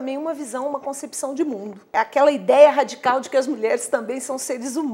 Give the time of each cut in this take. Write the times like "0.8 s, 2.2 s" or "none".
1.9 s